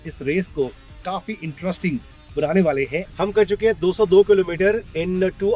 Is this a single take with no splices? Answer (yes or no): no